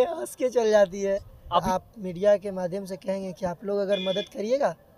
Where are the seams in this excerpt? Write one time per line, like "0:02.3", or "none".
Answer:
0:01.6

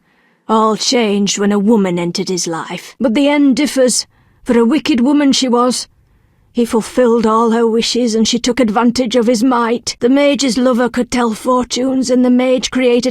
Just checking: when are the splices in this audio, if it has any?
0:02.9
0:09.9

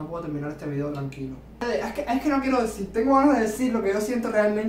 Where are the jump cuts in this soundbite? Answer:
0:01.5

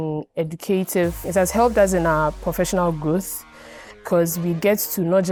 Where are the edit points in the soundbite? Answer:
none

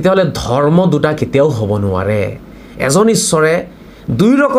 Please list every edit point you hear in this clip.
0:02.6

